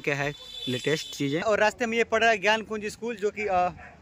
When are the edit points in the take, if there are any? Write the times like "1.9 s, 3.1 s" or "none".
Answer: 1.4 s

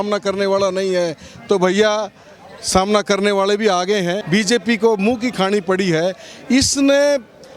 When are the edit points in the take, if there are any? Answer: 4.2 s

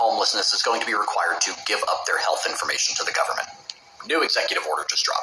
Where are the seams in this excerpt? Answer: none

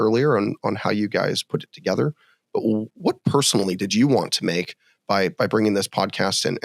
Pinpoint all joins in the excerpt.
none

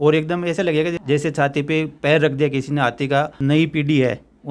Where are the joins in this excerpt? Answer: 1.0 s, 3.3 s

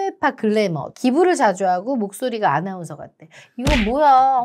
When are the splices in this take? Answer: 0.9 s

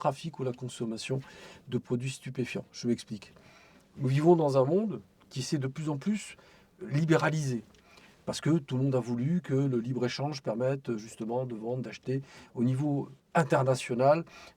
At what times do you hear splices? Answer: none

